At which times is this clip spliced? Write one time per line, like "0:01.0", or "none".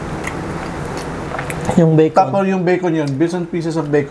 0:01.3